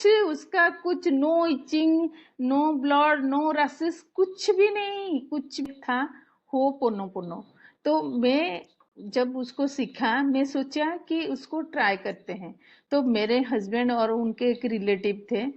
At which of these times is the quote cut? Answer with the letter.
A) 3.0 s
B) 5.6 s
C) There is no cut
B